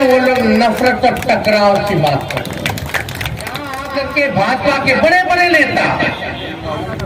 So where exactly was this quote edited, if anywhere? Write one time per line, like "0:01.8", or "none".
0:03.8

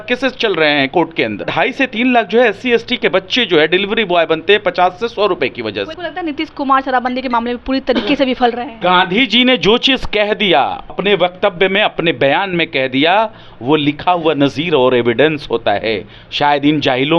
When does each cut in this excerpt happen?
0:01.5
0:05.9
0:08.8

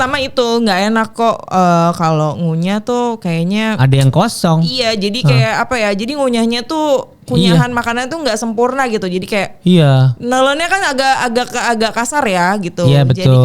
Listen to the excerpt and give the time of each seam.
none

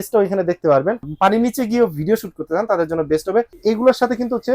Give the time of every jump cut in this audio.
0:01.1
0:03.5

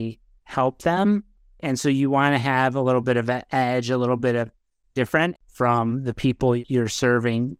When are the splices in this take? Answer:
0:01.6
0:05.4
0:06.6

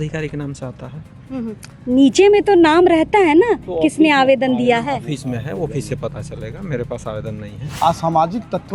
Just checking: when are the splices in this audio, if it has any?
0:07.6

